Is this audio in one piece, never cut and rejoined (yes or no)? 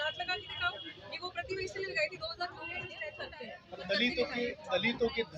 no